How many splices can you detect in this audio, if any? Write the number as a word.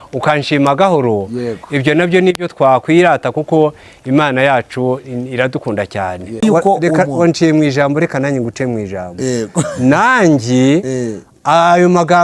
one